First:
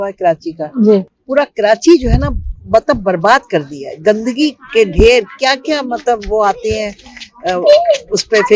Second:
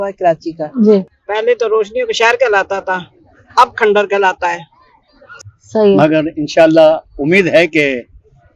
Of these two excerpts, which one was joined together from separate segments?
second; 2 cuts; at 1.2 s, 5.3 s

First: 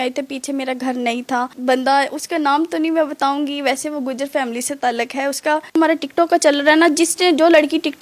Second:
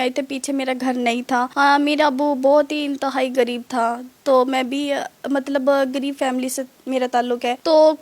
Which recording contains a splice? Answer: first; 2 cuts; at 1.5 s, 5.7 s

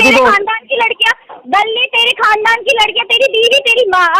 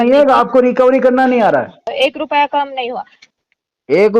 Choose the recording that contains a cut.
second; 1 cut; at 1.9 s

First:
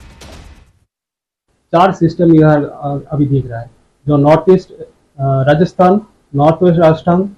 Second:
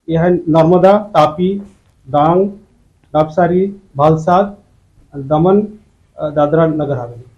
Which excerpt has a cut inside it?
first; 1 cut; at 1.0 s

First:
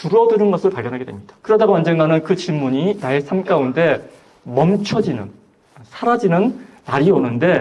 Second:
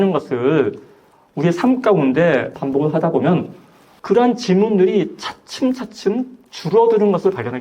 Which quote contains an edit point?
second; 1 cut; at 2.6 s

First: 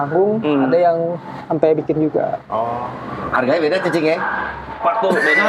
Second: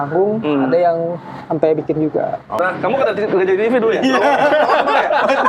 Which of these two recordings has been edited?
second; 1 cut; at 2.6 s

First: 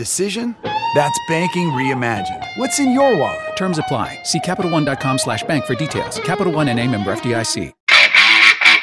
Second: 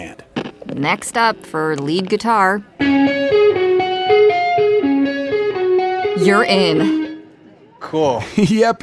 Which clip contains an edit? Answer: first; 1 cut; at 7.8 s

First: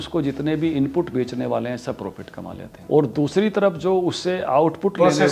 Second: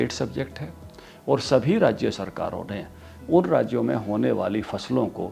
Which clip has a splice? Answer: first; 1 cut; at 2.7 s

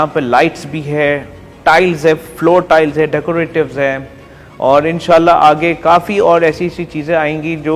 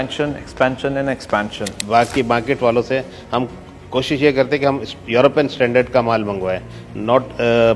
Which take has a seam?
second; 1 cut; at 1.8 s

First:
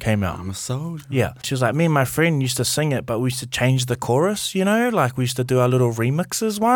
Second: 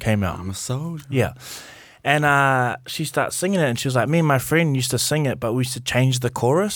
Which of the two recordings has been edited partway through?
first; 1 cut; at 1.5 s

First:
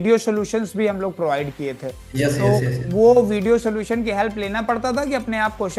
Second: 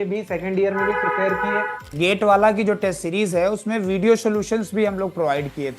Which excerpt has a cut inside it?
second; 1 cut; at 1.9 s

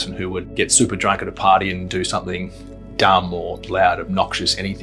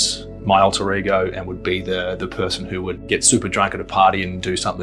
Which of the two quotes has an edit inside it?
first; 1 cut; at 3.6 s

